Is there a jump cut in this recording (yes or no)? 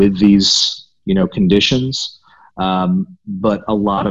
no